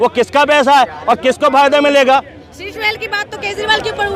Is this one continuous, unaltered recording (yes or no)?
yes